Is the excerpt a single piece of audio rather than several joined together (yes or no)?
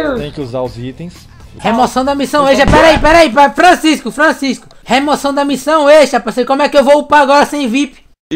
no